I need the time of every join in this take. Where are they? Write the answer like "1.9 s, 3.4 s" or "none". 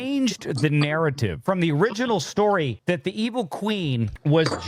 1.4 s, 2.8 s